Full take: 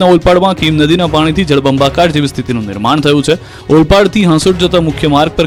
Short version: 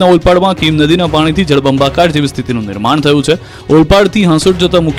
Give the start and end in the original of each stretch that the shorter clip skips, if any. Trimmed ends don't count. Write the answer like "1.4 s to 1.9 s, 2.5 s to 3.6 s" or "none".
none